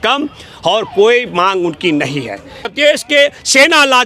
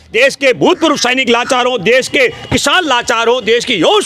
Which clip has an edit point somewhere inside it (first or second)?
first